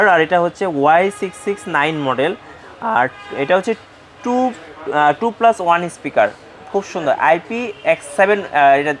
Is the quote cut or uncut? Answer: uncut